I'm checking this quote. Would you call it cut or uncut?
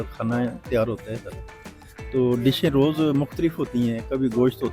uncut